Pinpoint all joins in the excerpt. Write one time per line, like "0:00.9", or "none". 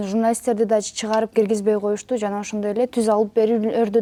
none